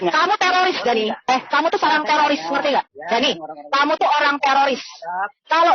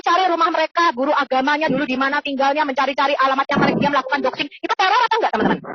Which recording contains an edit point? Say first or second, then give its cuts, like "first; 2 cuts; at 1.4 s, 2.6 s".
first; 1 cut; at 1.2 s